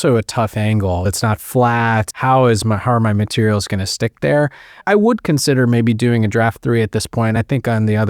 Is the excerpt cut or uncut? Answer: cut